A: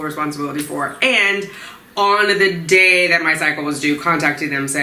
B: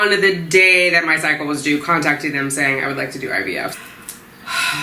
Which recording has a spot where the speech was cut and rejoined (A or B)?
B